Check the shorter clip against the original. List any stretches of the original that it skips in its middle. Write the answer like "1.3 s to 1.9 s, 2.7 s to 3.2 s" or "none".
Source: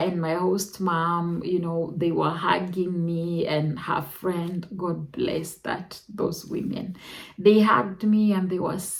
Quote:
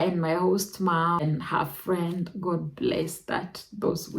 1.2 s to 3.6 s